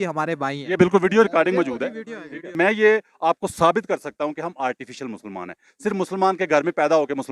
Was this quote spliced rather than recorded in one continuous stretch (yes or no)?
yes